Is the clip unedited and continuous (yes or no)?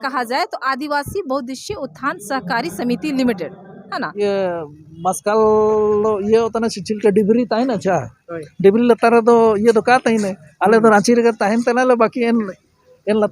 no